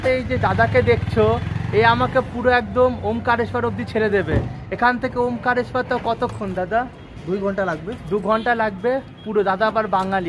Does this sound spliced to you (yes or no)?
no